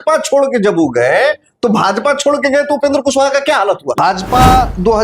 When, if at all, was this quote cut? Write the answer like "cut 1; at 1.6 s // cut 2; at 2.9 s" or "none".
cut 1; at 4.0 s